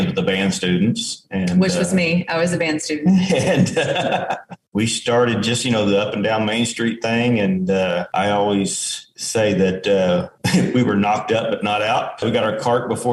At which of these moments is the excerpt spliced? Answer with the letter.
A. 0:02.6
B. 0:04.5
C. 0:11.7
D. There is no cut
B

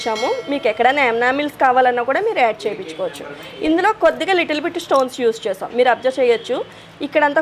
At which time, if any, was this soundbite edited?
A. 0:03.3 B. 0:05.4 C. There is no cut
C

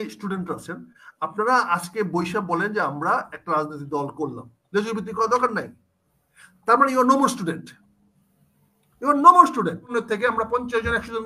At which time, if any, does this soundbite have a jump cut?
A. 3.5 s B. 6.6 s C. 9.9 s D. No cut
C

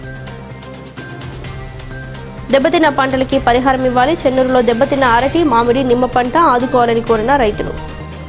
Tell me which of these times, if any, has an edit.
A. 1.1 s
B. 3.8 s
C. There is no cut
A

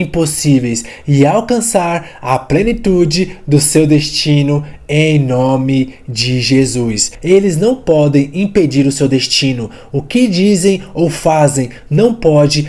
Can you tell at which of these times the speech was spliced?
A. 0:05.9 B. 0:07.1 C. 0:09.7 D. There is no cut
B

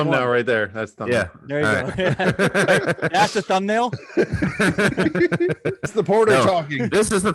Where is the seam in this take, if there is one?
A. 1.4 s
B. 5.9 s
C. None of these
B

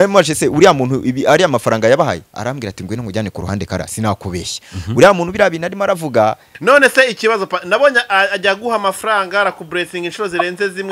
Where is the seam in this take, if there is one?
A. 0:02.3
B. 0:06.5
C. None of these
B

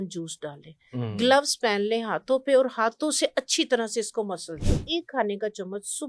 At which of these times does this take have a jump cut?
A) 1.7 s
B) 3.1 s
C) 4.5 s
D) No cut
C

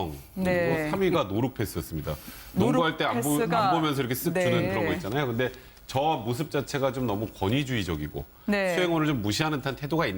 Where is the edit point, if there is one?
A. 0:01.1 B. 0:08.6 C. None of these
A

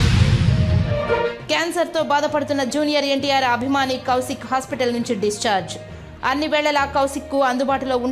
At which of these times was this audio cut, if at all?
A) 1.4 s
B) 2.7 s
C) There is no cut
A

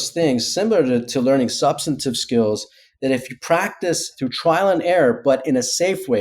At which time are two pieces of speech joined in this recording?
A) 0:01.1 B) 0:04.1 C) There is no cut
B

